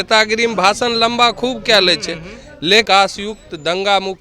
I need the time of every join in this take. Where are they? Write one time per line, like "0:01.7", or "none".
0:02.9